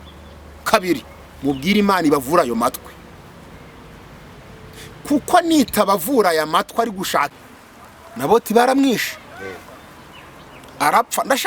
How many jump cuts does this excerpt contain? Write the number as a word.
one